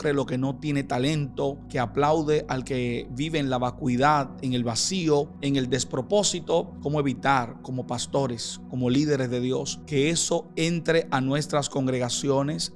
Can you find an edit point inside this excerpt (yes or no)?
yes